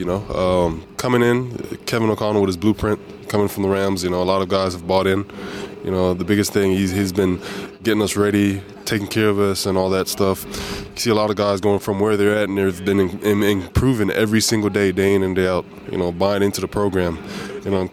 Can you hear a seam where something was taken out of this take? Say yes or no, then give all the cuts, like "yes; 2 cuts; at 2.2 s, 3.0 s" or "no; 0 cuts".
yes; 2 cuts; at 10.4 s, 11.8 s